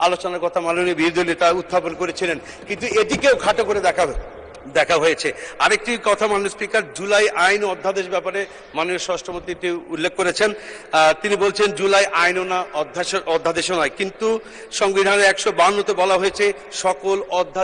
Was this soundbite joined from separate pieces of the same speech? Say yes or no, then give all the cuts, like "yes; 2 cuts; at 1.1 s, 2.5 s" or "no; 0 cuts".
no; 0 cuts